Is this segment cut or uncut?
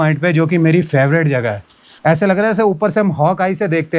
uncut